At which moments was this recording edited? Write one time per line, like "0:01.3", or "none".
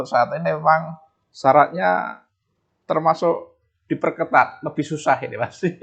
none